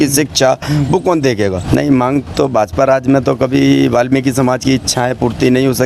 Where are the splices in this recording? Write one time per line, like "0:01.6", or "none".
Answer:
0:01.6